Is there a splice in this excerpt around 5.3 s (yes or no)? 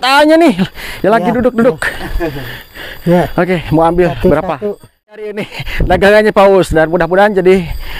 yes